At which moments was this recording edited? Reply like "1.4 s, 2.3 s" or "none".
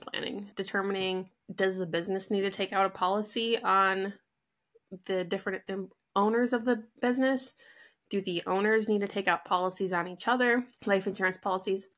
1.4 s, 10.7 s

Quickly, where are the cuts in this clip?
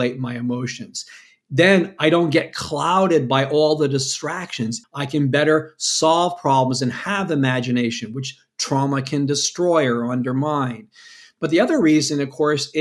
4.8 s

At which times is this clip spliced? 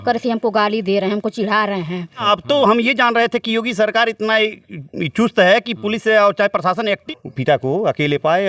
2.2 s, 7.0 s

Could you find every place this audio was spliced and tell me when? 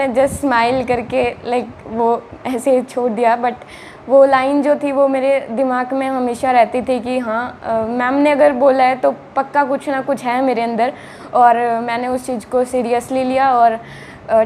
none

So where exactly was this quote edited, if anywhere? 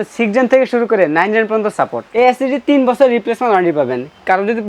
2.0 s

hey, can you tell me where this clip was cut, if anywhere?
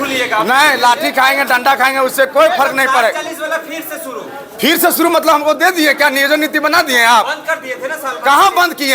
none

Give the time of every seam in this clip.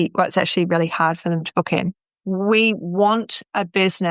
2.1 s

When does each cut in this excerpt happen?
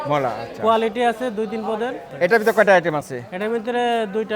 2.0 s

